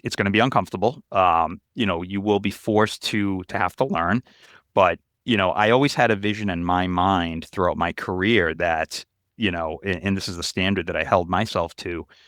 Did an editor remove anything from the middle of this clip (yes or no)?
no